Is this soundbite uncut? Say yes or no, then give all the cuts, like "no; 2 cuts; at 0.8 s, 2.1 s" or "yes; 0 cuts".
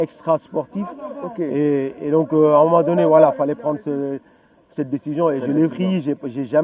yes; 0 cuts